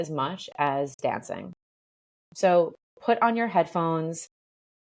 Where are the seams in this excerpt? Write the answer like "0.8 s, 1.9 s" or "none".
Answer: none